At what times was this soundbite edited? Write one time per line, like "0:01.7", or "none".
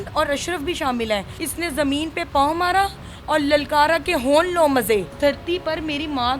0:01.4
0:05.1